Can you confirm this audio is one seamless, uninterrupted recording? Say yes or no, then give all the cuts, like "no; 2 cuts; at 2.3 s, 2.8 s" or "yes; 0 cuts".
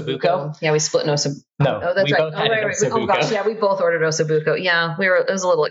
yes; 0 cuts